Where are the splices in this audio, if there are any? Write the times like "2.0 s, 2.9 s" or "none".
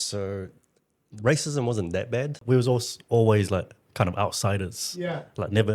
2.4 s